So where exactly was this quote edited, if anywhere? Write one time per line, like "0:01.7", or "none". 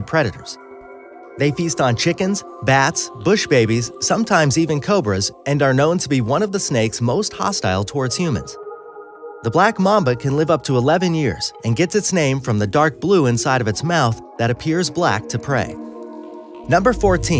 none